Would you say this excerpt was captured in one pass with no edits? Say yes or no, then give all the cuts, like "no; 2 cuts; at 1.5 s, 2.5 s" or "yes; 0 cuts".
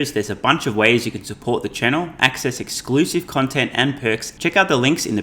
no; 1 cut; at 4.3 s